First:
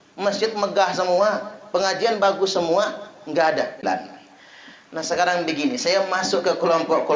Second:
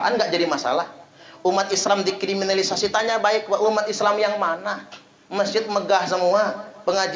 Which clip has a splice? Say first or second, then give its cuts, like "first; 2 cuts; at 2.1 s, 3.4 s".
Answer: first; 1 cut; at 3.8 s